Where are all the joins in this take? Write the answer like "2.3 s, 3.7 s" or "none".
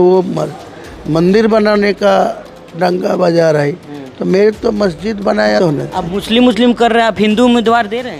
5.6 s